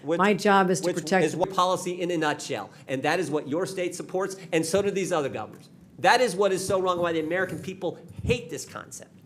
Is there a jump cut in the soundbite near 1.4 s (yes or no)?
yes